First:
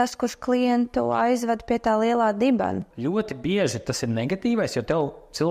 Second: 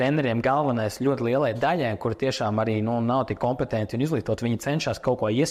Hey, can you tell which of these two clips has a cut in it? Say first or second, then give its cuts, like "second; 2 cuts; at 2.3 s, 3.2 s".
first; 1 cut; at 2.8 s